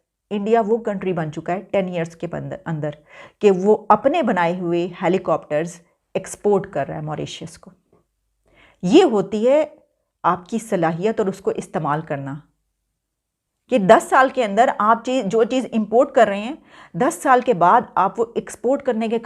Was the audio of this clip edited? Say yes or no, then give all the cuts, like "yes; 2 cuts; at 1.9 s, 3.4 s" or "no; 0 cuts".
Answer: no; 0 cuts